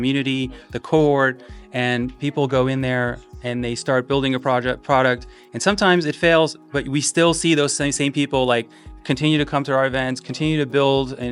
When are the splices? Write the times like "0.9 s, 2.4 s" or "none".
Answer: none